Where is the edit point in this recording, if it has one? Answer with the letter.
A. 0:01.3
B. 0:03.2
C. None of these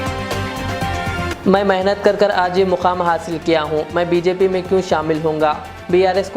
A